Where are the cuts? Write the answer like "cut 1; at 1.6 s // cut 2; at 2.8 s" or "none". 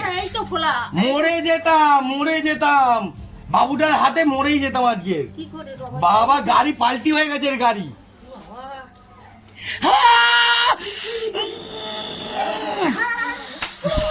none